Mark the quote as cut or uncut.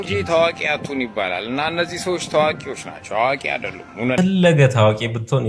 cut